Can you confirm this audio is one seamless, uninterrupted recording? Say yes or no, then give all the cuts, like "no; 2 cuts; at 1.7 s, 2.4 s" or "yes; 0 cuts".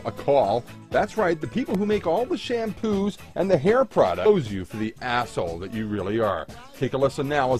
yes; 0 cuts